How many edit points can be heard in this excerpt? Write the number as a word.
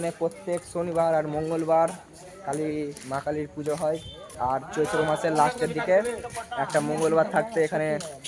one